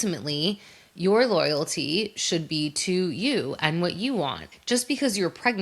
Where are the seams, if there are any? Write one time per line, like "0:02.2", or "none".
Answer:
0:04.5